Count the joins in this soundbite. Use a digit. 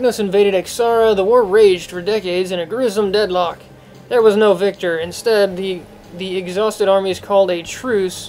0